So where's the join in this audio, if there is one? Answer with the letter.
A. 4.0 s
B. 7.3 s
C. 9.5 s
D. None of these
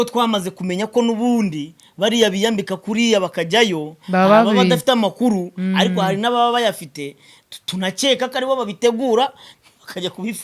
D